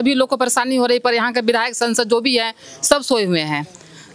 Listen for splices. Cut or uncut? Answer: uncut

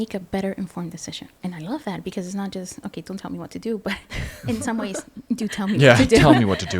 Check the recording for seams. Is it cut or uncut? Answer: cut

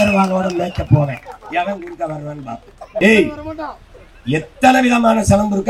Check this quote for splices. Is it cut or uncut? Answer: cut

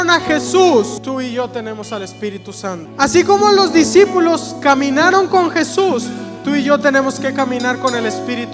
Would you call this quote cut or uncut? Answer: cut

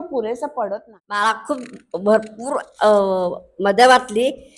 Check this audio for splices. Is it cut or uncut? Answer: cut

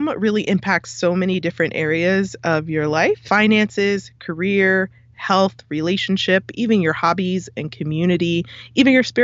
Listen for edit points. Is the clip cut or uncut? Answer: cut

